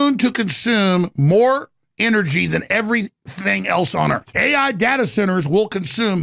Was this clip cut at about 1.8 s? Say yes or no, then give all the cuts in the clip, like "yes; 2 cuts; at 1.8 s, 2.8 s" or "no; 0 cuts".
no; 1 cut; at 4.2 s